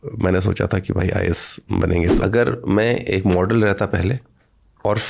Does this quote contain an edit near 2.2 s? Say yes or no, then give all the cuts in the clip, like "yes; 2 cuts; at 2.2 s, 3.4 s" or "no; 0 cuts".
yes; 1 cut; at 2.2 s